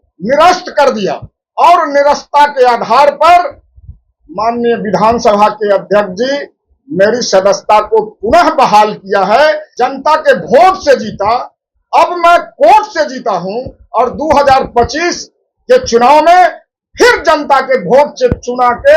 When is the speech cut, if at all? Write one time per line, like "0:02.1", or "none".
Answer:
0:09.7